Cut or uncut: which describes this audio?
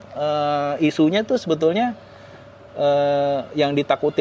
uncut